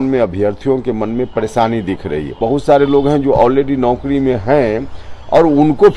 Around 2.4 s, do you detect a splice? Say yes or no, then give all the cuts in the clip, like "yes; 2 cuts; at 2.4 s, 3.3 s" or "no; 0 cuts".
yes; 1 cut; at 2.4 s